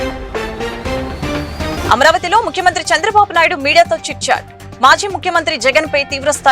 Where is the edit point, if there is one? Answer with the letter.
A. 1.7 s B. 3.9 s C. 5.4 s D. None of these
A